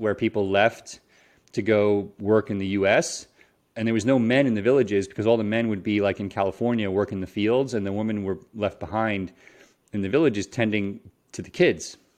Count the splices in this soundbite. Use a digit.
0